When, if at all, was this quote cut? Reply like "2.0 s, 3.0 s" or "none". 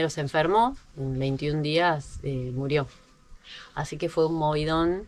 none